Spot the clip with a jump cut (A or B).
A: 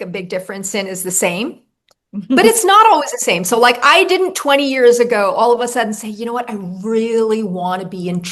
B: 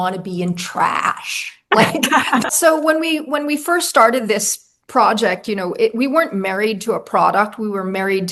B